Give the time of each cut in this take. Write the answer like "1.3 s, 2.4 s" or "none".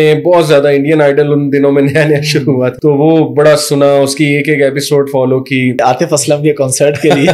2.8 s, 5.8 s